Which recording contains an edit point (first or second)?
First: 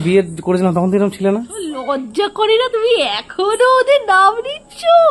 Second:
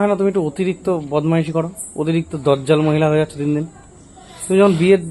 first